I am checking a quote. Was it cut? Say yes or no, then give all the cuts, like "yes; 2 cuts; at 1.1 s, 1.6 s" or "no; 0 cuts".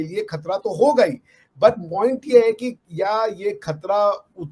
no; 0 cuts